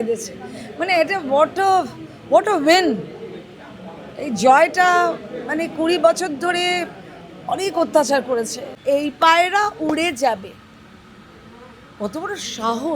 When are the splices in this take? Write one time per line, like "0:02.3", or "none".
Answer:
0:08.7